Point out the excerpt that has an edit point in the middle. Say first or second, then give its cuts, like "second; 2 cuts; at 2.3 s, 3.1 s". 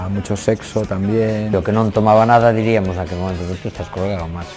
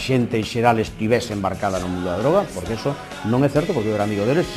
first; 1 cut; at 1.5 s